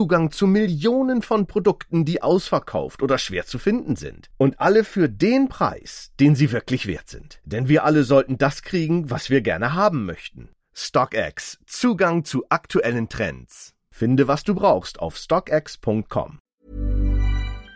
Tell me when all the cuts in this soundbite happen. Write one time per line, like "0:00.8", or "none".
0:16.4